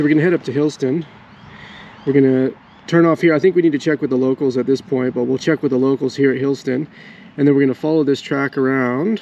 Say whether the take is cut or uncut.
uncut